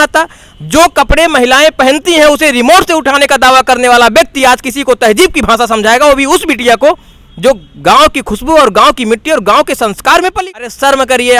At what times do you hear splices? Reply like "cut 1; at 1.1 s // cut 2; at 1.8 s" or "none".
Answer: cut 1; at 10.4 s